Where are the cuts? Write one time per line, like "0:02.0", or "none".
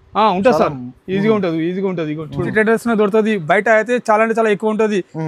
0:02.5